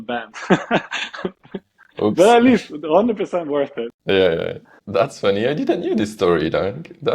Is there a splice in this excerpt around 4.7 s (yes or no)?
yes